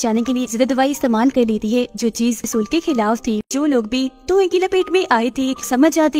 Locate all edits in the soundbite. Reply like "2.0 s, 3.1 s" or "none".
2.5 s, 3.4 s